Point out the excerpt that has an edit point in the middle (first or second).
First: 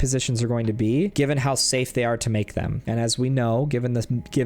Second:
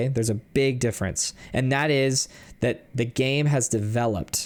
first